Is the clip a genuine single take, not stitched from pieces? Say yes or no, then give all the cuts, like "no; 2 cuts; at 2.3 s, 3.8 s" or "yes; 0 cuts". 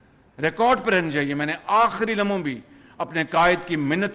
yes; 0 cuts